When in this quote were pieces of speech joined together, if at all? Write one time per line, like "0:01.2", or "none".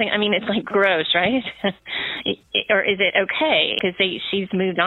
0:03.7